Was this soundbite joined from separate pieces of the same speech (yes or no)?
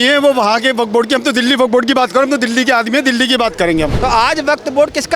yes